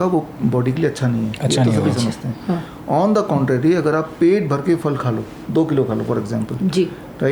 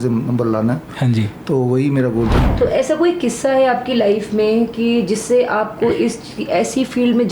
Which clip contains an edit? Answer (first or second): second